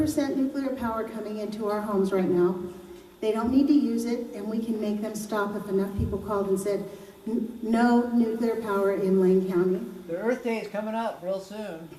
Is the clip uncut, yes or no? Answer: yes